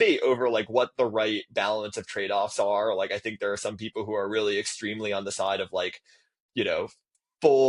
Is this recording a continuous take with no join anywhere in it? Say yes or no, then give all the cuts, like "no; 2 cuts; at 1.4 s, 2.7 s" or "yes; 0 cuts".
yes; 0 cuts